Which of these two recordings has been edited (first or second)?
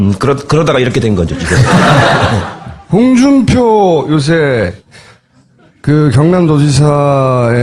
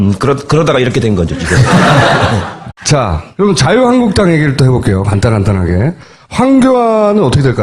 first